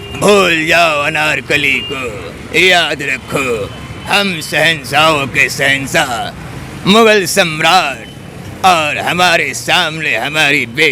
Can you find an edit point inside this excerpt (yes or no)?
no